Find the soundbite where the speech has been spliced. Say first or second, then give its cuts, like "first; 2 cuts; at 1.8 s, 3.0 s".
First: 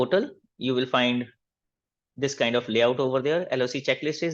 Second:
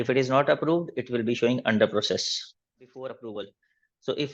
second; 1 cut; at 2.9 s